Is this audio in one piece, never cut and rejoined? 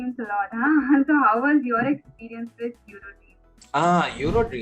no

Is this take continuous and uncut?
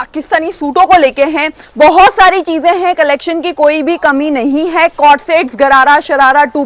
no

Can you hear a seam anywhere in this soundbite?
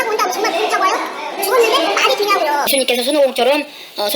yes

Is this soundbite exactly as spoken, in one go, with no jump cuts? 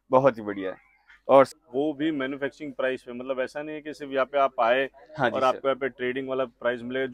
no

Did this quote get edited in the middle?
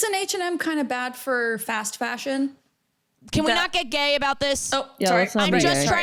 no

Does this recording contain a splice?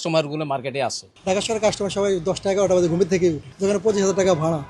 yes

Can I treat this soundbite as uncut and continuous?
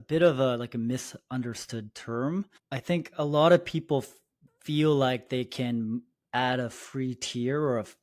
no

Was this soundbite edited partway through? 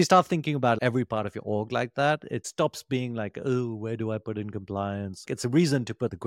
yes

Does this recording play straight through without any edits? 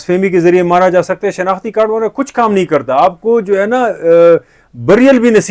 yes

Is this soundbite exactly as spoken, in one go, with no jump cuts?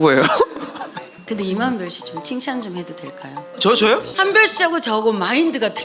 no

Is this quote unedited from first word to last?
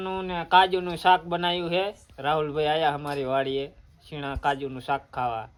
yes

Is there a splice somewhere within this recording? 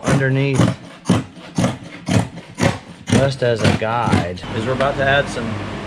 yes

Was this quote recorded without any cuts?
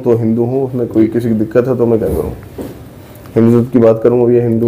yes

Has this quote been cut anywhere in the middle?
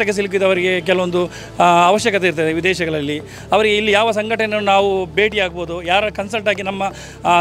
no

